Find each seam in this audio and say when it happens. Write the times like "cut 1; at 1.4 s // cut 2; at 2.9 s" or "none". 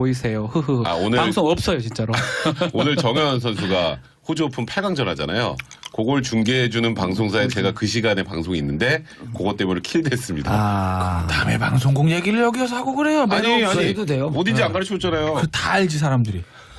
cut 1; at 14.7 s